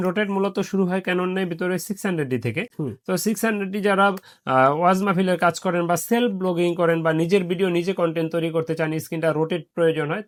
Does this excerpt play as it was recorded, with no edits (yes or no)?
yes